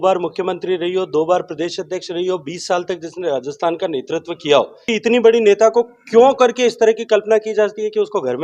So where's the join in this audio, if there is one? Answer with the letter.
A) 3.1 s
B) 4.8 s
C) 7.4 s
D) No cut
B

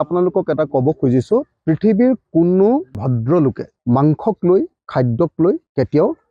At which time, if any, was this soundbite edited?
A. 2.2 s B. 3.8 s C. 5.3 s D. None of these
D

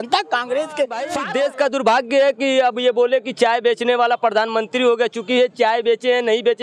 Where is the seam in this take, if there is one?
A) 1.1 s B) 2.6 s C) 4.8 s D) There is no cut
A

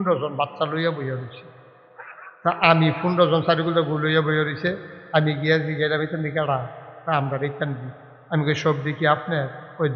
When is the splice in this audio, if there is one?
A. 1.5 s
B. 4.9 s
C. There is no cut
C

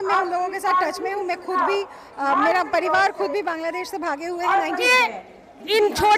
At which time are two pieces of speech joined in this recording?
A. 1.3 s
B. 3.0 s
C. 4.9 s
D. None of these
C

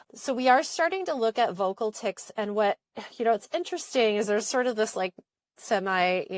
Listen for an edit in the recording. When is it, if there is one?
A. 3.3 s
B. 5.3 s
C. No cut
B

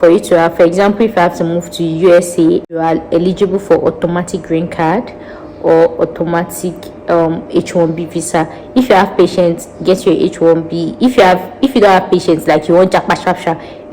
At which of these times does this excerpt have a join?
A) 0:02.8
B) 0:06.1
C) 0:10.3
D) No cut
A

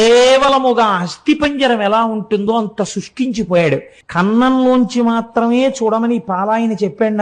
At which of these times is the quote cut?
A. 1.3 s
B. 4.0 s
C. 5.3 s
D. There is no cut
B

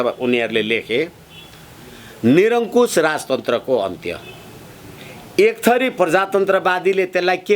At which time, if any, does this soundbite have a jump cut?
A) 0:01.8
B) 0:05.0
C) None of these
B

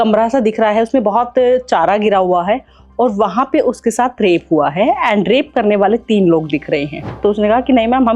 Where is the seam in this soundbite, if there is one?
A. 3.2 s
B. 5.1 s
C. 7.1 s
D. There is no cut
C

